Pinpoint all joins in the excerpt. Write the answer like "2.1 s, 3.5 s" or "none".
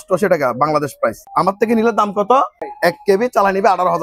1.3 s, 2.7 s